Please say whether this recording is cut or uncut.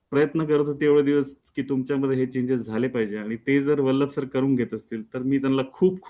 uncut